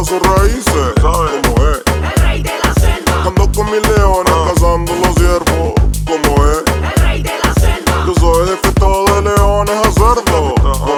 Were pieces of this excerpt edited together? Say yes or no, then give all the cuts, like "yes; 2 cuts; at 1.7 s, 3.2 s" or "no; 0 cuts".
no; 0 cuts